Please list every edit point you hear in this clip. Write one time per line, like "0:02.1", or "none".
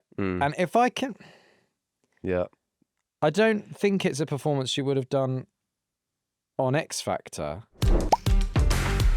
0:07.7